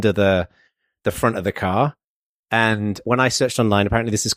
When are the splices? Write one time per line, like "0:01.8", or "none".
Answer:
0:03.0